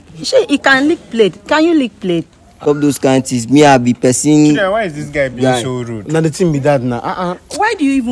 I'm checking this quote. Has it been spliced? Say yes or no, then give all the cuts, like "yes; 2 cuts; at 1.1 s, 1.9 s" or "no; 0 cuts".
yes; 1 cut; at 2.4 s